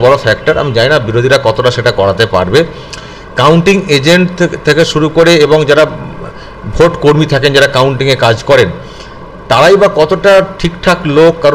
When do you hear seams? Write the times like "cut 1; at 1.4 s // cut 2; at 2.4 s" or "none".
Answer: none